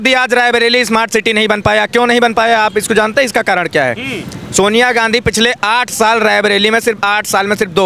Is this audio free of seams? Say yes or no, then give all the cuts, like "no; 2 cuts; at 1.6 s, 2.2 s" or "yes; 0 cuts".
yes; 0 cuts